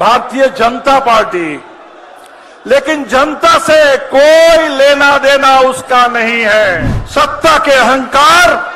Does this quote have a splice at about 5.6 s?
no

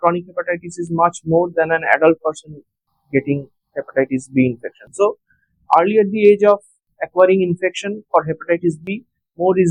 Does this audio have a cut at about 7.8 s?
no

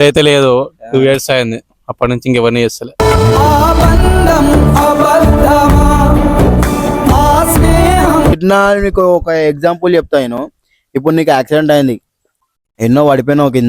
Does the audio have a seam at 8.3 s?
yes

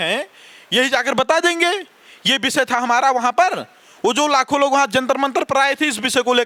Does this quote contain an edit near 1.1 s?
no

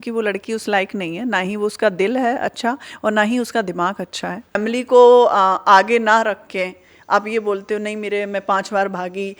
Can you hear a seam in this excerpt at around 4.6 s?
yes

